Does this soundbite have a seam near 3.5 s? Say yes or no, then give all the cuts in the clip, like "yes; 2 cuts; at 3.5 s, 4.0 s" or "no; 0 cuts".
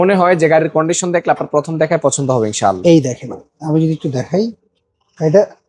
no; 0 cuts